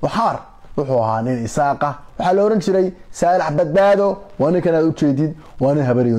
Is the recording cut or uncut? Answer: uncut